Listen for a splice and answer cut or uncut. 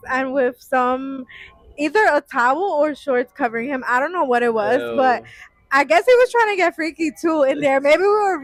uncut